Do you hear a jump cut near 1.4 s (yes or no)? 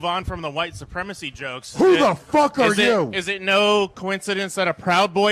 no